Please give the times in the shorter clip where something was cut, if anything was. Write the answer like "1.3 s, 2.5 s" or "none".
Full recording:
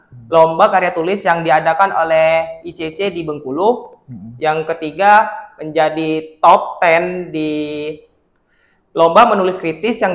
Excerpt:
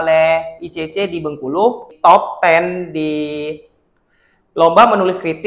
1.9 s